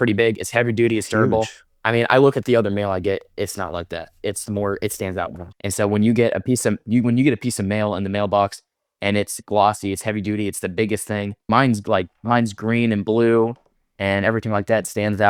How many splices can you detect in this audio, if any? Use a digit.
0